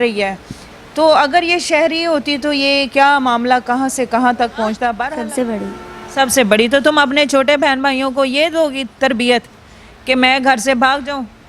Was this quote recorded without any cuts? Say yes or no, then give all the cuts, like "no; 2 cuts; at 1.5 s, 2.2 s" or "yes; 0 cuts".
no; 1 cut; at 5.0 s